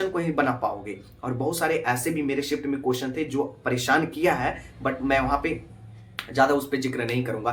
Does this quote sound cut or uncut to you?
uncut